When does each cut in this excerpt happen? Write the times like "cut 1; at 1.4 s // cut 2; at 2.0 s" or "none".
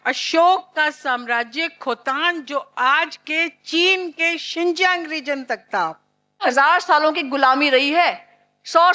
cut 1; at 6.4 s